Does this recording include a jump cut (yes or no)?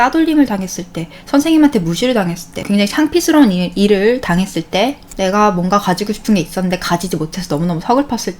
yes